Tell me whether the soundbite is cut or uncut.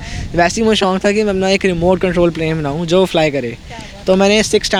uncut